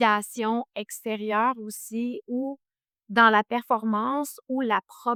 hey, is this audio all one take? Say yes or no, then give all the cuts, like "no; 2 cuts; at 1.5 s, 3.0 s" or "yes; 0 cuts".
yes; 0 cuts